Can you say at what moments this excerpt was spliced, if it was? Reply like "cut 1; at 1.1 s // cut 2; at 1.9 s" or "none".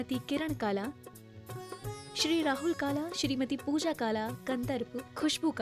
cut 1; at 0.9 s

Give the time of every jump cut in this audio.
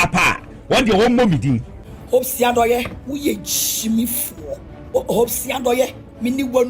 cut 1; at 1.7 s // cut 2; at 5.0 s

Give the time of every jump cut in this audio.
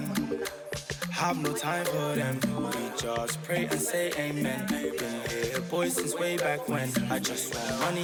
none

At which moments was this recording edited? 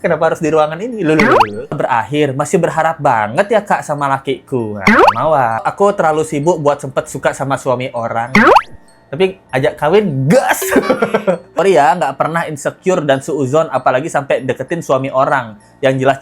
cut 1; at 1.7 s // cut 2; at 5.6 s // cut 3; at 11.6 s

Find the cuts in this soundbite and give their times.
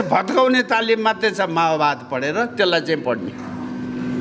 none

